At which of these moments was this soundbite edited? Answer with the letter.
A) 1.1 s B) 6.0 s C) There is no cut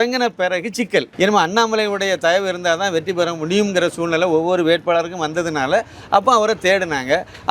A